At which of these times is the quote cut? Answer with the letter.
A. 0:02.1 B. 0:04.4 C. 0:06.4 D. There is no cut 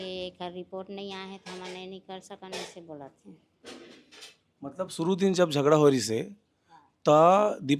D